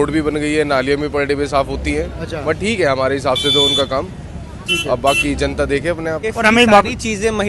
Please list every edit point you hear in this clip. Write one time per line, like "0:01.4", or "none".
0:06.3